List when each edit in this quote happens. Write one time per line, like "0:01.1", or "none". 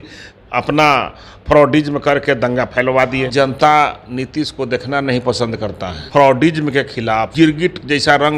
0:03.3
0:05.9
0:07.3